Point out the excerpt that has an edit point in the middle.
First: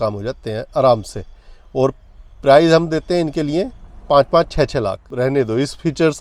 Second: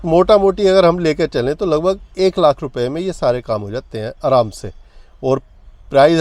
first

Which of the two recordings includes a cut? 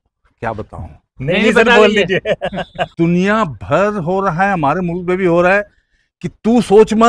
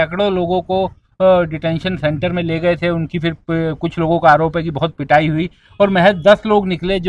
first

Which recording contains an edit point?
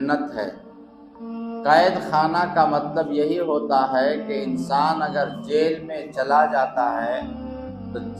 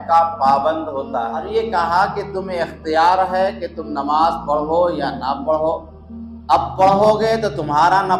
second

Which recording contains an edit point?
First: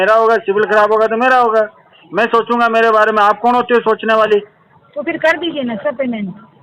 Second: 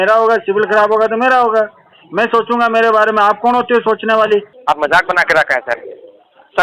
second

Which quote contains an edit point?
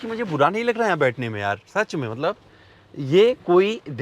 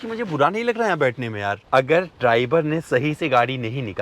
second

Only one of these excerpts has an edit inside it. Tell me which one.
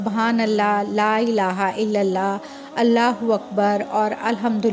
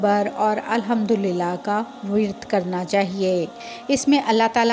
second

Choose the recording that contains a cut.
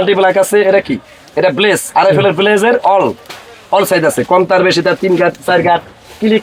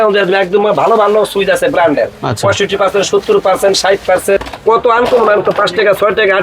second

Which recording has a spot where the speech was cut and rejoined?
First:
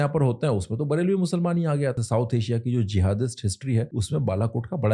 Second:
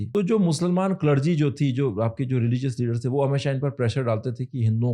first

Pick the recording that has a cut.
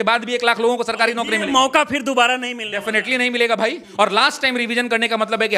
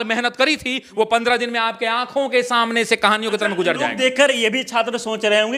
first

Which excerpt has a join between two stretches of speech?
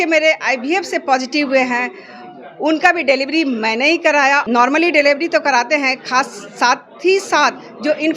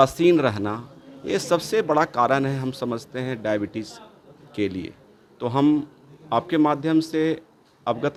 first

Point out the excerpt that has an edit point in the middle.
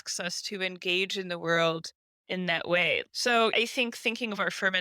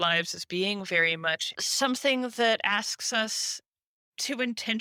first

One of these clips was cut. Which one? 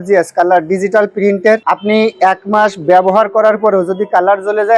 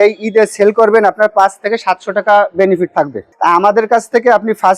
second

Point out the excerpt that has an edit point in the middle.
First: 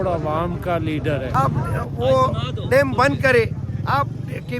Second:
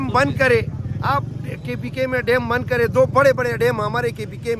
first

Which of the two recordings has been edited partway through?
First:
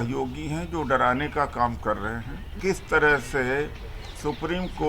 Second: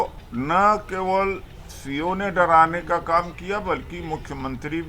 first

